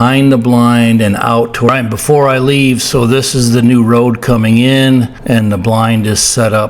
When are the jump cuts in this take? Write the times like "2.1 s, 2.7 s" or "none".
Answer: 1.7 s, 5.2 s